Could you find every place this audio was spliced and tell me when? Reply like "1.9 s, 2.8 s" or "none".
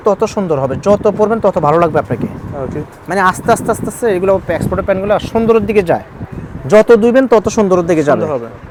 none